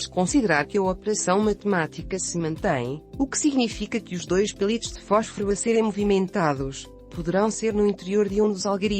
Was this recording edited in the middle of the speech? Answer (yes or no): yes